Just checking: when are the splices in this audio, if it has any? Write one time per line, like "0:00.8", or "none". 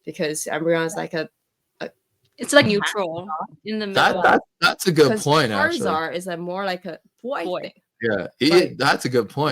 0:02.7